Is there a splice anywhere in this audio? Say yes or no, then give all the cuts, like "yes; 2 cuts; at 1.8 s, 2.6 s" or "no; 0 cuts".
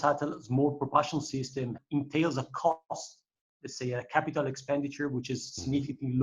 yes; 1 cut; at 1.8 s